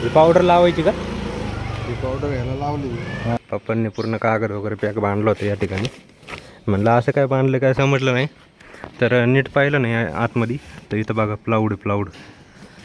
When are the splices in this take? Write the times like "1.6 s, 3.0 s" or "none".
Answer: 3.4 s